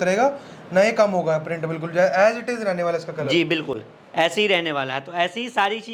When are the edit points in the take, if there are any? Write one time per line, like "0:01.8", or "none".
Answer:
none